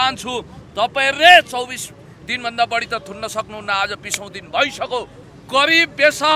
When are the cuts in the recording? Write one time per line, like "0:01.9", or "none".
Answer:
0:05.2

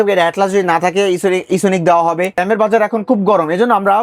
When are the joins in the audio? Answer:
0:02.4

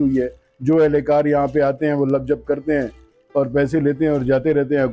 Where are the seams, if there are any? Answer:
none

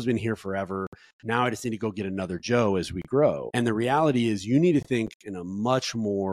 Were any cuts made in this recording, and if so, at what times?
0:03.5

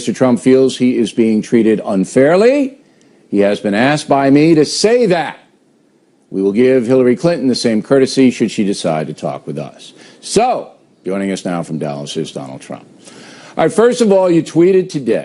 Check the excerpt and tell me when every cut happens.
0:06.0

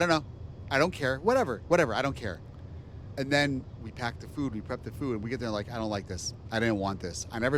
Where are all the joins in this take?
none

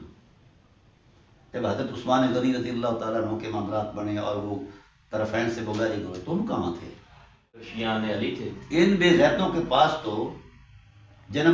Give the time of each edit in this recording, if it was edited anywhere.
0:07.7

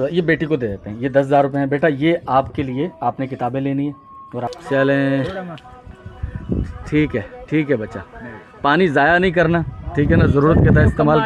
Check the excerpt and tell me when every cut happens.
0:04.5

